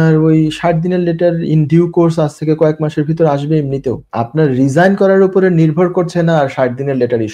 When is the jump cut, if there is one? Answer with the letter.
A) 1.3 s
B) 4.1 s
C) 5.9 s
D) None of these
B